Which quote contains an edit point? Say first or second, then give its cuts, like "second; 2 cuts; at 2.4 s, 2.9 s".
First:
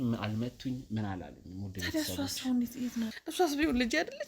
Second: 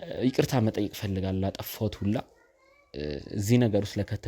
first; 1 cut; at 3.2 s